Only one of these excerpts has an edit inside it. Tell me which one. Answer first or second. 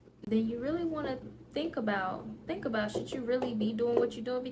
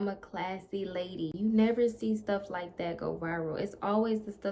second